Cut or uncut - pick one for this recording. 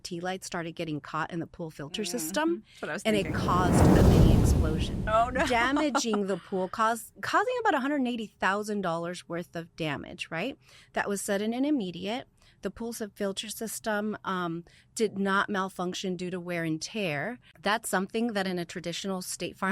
cut